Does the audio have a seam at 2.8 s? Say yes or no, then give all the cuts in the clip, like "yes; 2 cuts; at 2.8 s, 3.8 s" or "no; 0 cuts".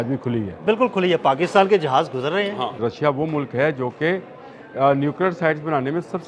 yes; 1 cut; at 2.8 s